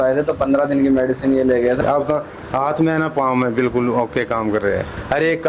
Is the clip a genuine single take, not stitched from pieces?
no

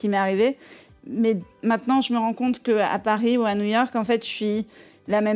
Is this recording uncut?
no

